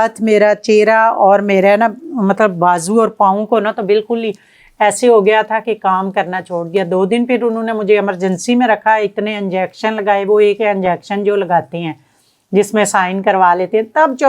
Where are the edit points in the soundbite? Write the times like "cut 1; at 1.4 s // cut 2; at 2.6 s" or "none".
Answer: none